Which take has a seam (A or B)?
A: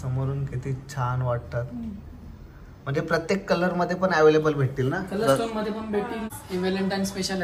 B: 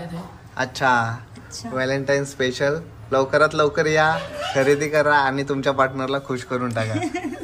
A